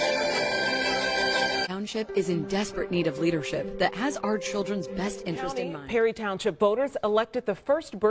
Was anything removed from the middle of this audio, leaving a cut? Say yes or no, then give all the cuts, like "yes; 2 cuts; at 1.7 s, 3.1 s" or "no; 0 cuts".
yes; 1 cut; at 1.6 s